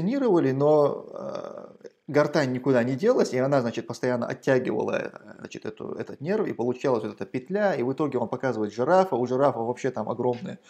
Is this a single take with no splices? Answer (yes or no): yes